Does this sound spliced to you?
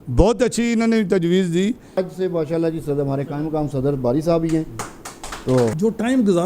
yes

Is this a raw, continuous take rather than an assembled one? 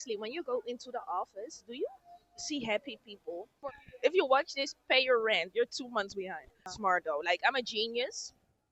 no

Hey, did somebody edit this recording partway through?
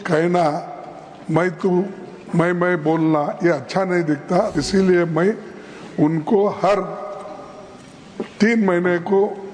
yes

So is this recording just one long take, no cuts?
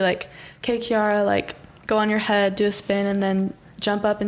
yes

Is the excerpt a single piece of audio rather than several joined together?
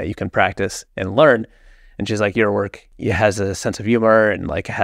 no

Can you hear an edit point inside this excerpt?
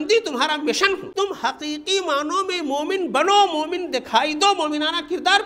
yes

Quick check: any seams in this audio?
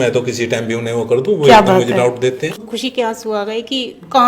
yes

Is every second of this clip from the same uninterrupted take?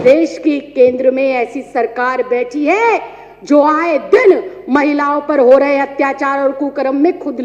yes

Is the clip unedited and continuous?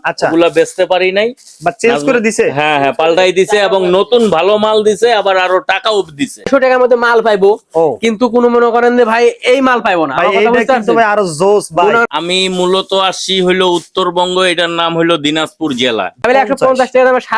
no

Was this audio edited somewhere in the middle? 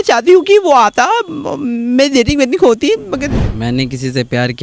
yes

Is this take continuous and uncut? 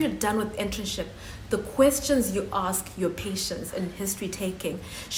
yes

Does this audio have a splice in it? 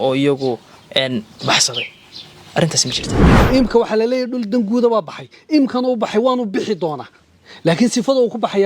yes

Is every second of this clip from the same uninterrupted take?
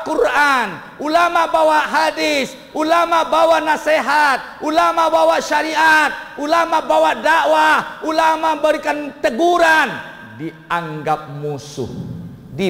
yes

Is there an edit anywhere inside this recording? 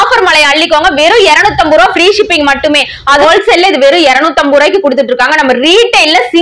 yes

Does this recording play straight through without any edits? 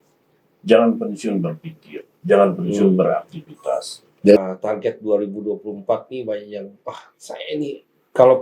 no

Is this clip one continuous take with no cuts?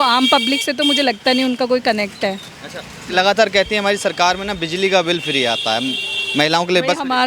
yes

